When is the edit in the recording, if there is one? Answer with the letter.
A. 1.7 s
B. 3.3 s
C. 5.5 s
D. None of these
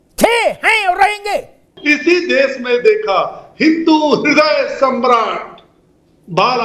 A